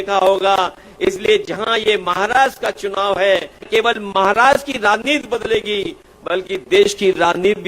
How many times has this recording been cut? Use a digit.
1